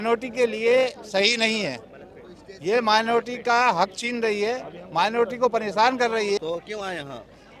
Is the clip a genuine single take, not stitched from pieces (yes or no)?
no